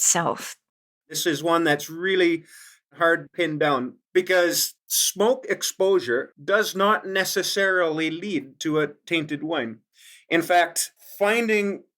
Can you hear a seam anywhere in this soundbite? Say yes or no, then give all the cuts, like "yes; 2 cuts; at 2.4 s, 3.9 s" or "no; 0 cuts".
yes; 2 cuts; at 1.2 s, 2.9 s